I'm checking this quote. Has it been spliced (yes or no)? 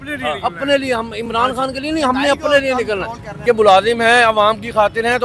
yes